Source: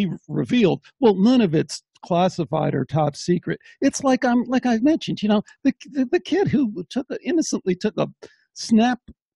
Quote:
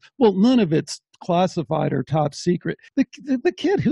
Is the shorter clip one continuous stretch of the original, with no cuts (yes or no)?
no